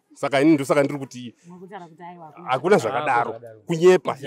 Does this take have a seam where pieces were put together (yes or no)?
no